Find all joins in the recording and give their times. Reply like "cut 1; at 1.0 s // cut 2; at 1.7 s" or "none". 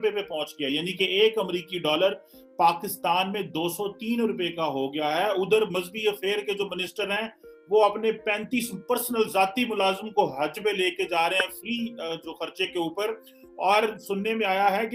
none